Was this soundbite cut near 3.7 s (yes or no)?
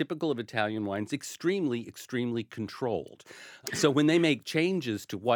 yes